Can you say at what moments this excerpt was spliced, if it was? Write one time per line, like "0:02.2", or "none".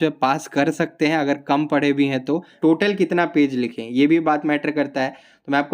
0:02.5

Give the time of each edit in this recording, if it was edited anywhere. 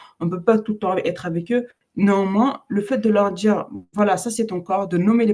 0:01.8

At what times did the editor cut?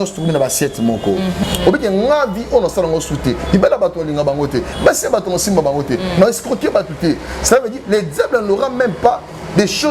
0:01.4

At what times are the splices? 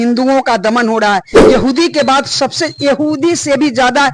0:01.3

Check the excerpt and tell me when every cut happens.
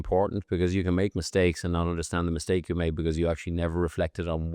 none

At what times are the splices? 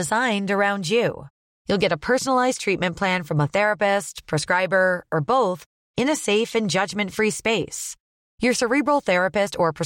none

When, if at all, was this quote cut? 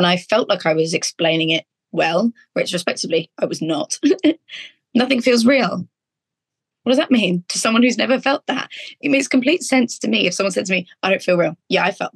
none

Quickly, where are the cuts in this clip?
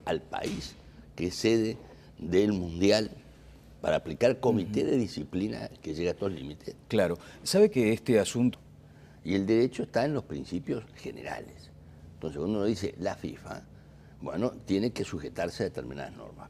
none

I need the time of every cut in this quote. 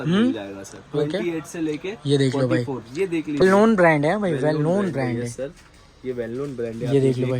0:03.4

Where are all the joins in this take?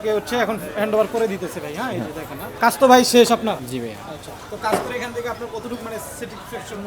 0:02.5
0:03.6

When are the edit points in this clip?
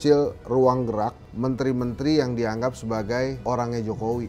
none

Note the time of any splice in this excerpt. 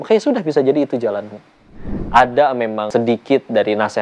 0:01.9
0:02.9

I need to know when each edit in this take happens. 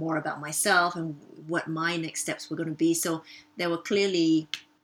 none

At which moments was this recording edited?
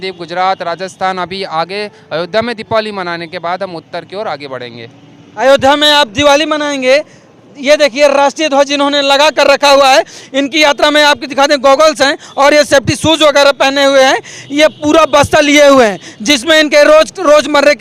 none

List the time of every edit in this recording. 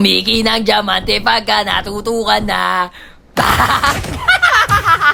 none

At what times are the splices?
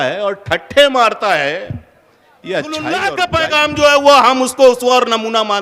0:03.2

